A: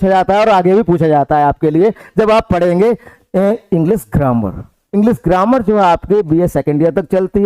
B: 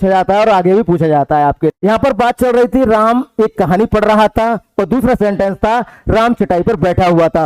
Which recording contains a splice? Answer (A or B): B